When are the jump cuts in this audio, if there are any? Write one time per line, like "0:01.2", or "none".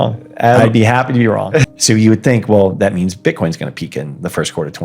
0:01.7